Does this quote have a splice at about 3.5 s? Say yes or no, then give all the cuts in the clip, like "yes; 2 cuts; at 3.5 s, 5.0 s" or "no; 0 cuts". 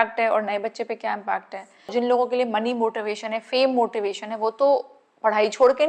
no; 1 cut; at 1.9 s